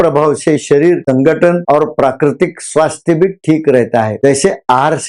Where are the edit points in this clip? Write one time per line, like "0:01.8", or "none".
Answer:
none